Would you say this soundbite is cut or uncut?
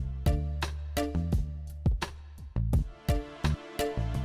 cut